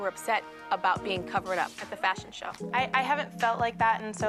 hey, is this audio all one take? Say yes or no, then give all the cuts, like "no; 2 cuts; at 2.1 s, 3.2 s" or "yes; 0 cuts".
yes; 0 cuts